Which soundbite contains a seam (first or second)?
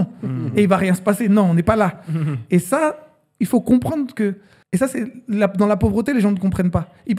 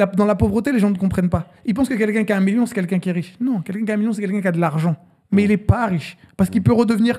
first